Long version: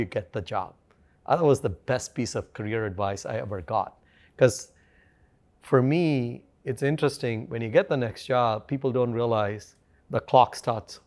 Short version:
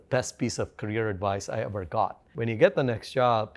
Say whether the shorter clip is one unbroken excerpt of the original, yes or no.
no